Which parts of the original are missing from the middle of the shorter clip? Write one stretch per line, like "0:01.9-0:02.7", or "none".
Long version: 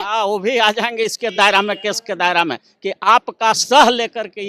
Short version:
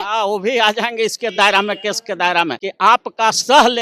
0:02.6-0:02.8

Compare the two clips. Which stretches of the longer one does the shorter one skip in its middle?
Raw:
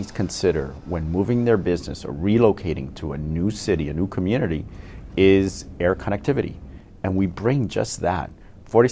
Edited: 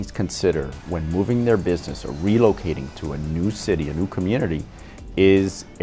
none

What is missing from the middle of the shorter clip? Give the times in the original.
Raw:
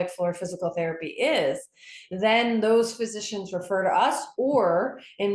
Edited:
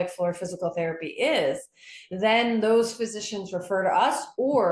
none

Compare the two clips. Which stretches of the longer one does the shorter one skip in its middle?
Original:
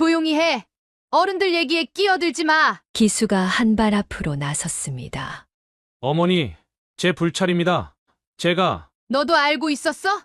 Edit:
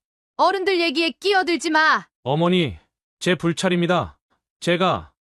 0:02.8-0:05.9

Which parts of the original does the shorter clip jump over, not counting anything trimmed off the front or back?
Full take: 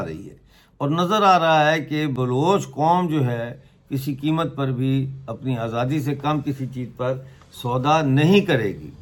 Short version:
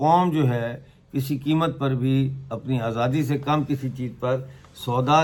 none

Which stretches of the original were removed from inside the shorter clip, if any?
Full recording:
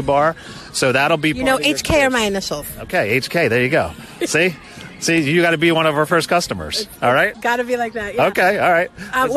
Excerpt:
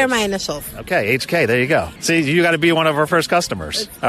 0:04.0-0:04.9

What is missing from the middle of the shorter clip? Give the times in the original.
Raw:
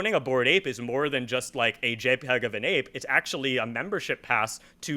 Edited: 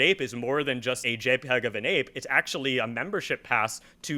0:01.5-0:01.8

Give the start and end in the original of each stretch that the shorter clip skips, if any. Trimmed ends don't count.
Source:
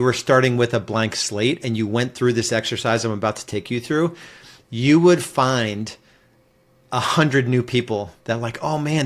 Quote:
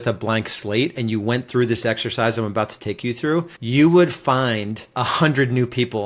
0:04.2-0:04.7
0:05.9-0:06.8

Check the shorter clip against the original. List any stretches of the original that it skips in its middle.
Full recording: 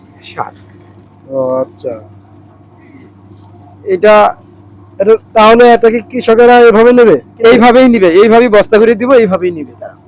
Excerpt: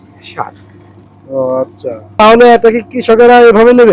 0:02.2-0:05.4

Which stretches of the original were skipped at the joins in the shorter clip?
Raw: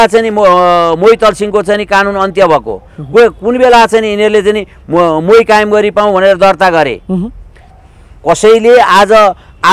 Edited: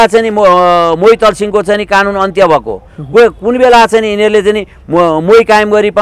none

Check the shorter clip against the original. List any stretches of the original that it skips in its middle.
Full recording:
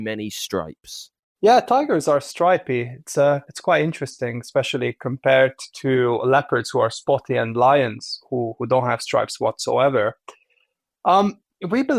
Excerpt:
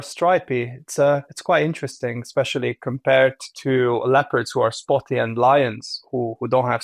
none

